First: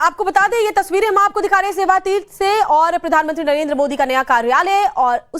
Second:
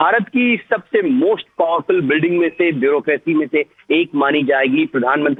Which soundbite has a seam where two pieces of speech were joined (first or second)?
first